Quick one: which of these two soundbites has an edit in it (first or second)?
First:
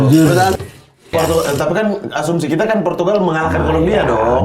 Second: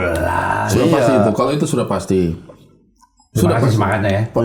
first